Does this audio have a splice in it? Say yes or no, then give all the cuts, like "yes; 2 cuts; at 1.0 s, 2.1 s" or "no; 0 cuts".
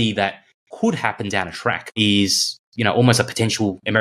no; 0 cuts